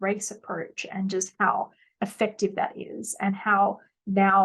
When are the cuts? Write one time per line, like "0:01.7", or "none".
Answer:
none